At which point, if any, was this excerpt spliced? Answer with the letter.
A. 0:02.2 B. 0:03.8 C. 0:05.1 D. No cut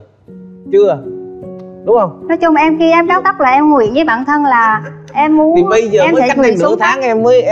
D